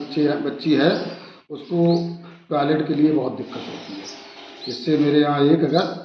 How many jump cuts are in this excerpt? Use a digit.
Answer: 0